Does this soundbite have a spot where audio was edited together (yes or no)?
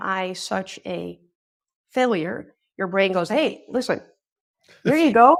no